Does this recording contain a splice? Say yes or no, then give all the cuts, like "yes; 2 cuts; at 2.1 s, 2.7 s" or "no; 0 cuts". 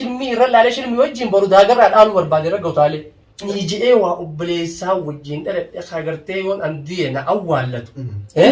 yes; 1 cut; at 3.5 s